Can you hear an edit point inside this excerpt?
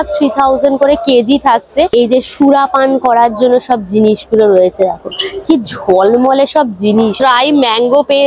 yes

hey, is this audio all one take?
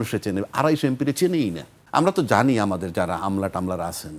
no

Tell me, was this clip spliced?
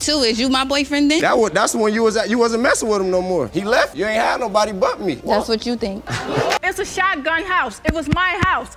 yes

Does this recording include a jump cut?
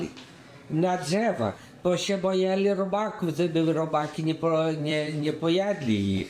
no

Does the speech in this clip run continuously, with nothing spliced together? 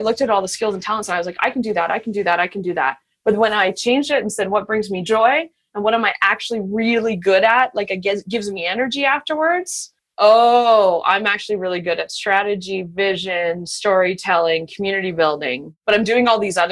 no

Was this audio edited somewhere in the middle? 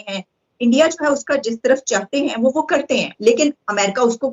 no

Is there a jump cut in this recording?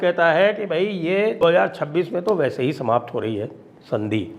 yes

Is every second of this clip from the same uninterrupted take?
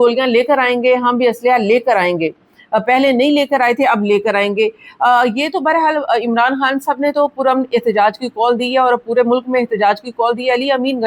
yes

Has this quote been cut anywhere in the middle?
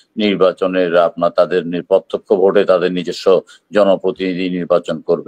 no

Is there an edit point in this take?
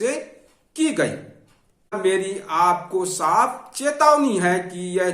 yes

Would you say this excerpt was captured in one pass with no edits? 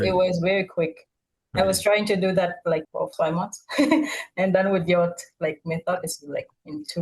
yes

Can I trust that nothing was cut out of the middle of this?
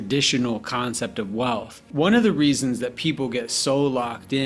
no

